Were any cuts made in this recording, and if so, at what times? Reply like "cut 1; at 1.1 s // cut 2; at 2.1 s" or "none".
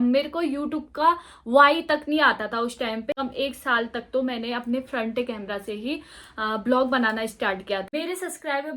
cut 1; at 3.2 s // cut 2; at 7.9 s

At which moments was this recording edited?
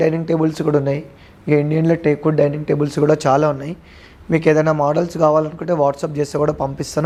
none

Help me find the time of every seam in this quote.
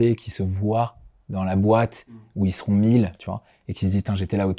none

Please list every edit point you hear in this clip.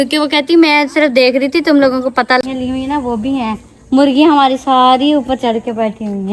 cut 1; at 2.4 s

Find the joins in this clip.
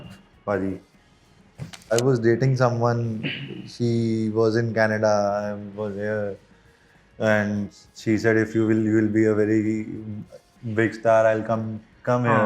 cut 1; at 1.9 s

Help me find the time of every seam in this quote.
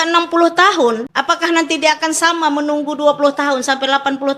cut 1; at 1.1 s

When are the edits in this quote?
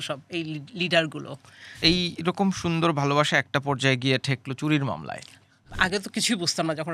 cut 1; at 1.7 s // cut 2; at 5.7 s

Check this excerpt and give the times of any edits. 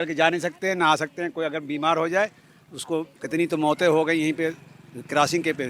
none

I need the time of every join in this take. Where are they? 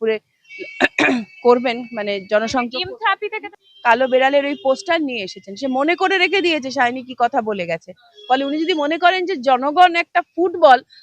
cut 1; at 3.5 s

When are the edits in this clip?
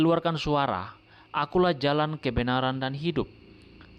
none

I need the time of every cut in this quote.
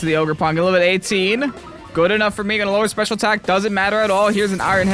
none

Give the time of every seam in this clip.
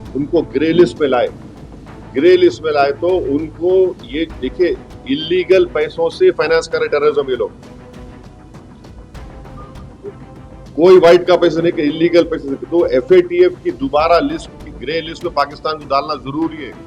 none

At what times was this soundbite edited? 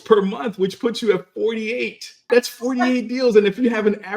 cut 1; at 2.3 s

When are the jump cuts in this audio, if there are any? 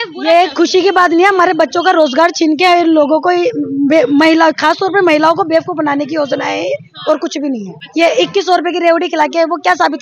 cut 1; at 7.8 s

